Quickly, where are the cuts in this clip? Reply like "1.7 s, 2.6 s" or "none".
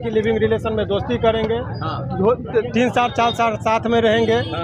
none